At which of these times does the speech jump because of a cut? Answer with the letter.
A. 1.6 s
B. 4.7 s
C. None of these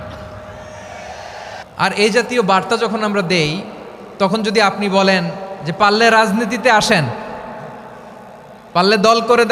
A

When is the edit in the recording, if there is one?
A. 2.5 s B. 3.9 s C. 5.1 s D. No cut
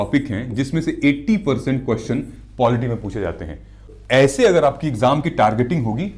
B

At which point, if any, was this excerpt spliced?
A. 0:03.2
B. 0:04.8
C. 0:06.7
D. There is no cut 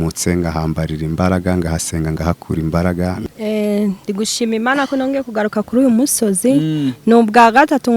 A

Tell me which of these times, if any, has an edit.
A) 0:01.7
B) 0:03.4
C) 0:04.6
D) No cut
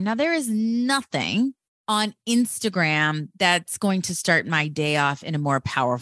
A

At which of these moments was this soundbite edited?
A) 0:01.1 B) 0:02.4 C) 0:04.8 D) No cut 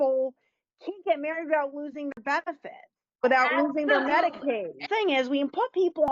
C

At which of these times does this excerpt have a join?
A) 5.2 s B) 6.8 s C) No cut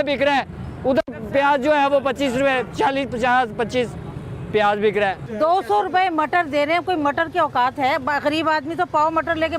A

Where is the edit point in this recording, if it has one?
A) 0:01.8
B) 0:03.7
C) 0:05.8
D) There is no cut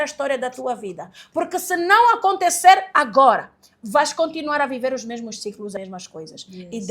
C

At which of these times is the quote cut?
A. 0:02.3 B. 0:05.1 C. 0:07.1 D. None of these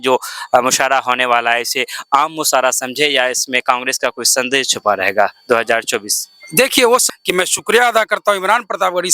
C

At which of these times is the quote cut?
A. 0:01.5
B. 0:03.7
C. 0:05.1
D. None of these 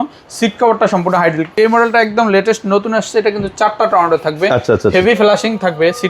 A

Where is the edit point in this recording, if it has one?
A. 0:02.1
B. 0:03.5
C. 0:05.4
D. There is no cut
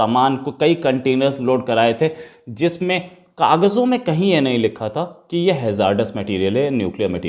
D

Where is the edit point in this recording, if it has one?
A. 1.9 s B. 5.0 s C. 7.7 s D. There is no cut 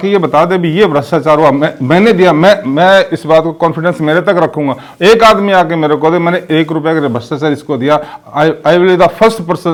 D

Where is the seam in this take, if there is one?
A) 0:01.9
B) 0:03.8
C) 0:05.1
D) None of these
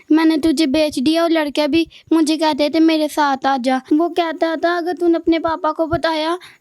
B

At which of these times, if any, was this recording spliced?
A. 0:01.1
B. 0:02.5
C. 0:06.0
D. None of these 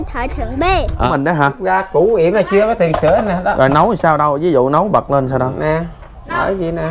A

